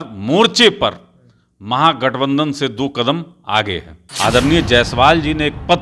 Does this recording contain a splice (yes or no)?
yes